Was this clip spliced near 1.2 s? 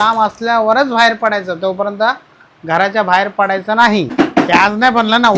no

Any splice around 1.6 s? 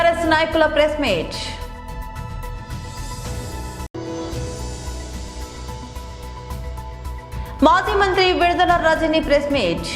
yes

